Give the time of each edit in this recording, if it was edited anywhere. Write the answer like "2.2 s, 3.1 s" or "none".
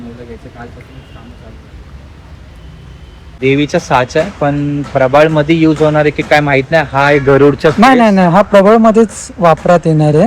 3.4 s

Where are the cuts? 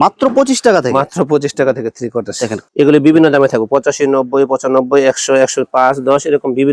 2.6 s

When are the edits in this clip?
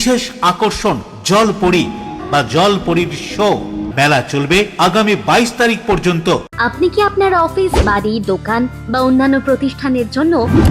2.2 s, 3.9 s, 6.5 s

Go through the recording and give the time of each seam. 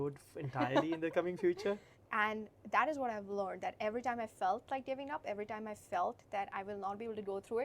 2.0 s

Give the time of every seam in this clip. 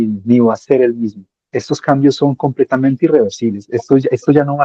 none

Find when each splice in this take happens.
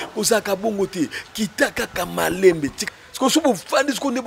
2.8 s

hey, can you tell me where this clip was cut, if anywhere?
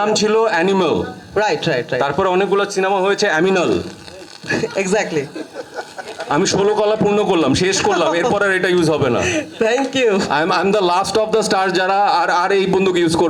none

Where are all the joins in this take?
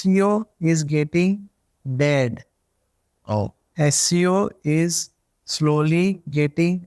none

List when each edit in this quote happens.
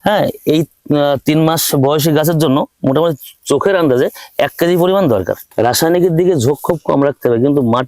5.4 s

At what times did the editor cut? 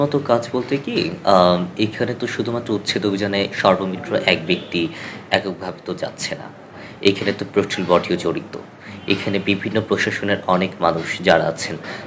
none

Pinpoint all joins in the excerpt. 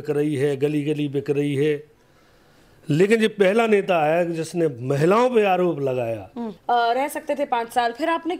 6.5 s

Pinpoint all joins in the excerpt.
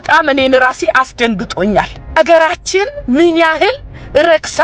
2.2 s

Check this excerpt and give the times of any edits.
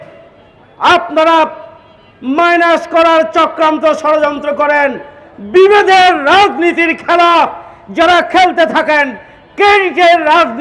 none

